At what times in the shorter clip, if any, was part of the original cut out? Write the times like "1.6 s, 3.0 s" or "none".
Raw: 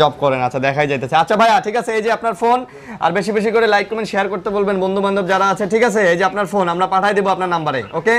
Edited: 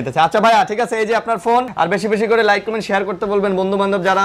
1.7 s